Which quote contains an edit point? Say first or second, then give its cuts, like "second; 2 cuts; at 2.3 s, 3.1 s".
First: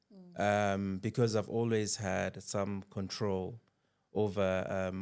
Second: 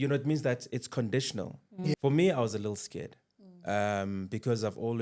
second; 1 cut; at 1.9 s